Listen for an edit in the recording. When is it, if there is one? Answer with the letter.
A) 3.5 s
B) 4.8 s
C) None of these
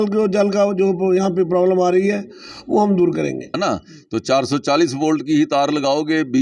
A